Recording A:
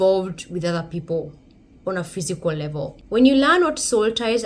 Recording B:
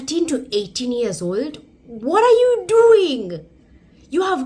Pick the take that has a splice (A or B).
A